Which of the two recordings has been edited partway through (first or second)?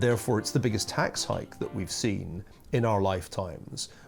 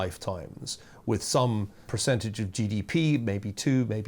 second